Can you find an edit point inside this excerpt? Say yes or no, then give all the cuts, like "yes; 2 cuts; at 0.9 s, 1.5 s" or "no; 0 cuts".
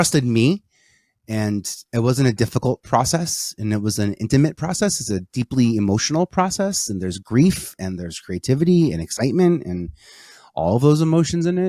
no; 0 cuts